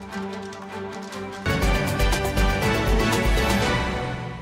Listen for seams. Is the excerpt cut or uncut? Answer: cut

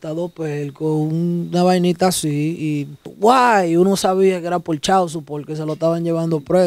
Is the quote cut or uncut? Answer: cut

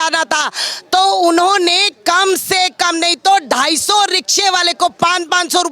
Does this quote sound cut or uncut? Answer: uncut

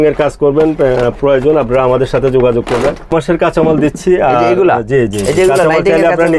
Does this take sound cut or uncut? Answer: cut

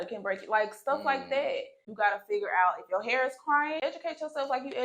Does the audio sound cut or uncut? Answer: cut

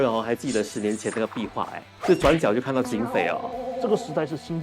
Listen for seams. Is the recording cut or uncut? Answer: cut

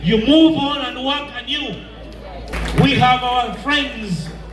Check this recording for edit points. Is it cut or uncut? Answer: cut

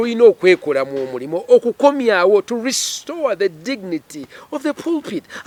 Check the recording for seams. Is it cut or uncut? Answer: uncut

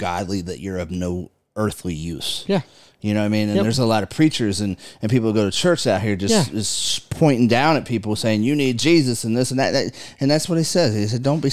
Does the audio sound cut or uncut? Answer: uncut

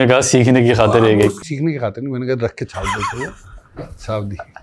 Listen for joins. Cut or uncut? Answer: cut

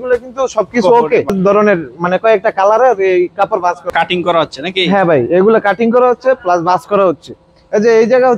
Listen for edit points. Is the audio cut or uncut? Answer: cut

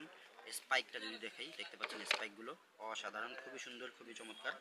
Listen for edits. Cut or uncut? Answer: uncut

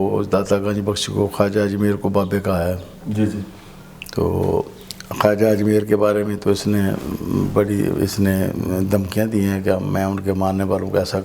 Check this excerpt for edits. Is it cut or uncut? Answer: uncut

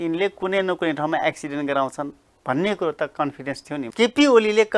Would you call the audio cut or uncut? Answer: cut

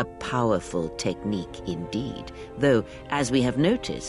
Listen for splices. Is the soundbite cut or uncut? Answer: uncut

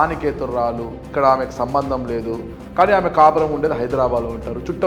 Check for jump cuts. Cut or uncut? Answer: cut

